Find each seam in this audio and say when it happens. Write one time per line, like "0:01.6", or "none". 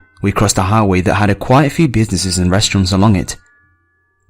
0:01.2